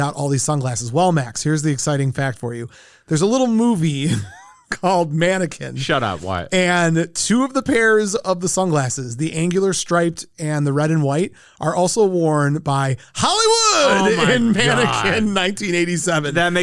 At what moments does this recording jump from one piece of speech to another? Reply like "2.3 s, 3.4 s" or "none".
none